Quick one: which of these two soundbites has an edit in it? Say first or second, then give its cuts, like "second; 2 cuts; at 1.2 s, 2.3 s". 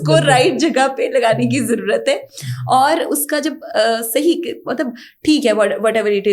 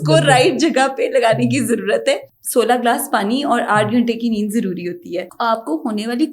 second; 2 cuts; at 2.3 s, 5.3 s